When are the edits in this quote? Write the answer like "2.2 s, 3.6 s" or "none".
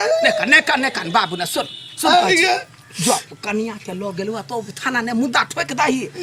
none